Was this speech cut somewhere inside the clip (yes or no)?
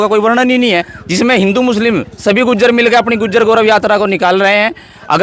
yes